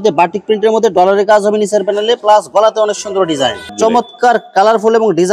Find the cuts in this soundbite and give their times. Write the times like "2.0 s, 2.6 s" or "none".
3.7 s